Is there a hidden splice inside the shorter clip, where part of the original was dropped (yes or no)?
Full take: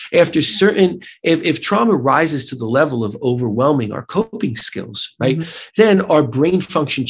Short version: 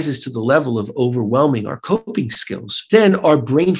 yes